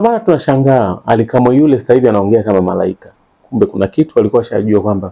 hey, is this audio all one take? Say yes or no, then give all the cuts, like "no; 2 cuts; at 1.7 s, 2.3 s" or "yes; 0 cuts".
yes; 0 cuts